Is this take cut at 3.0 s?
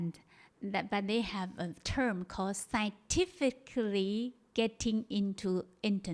no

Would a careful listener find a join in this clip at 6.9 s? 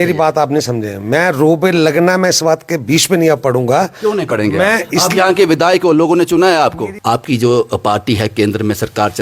yes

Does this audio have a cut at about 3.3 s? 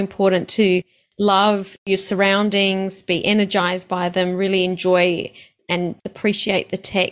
no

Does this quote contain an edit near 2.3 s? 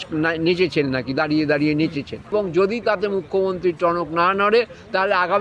yes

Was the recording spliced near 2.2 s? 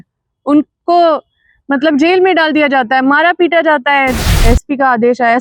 no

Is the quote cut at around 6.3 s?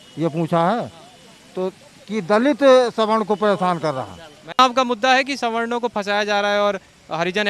no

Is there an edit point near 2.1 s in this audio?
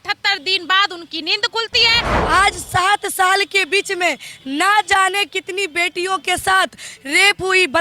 yes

